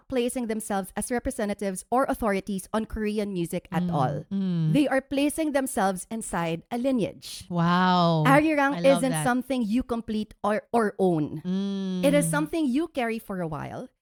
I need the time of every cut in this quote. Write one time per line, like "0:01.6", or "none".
none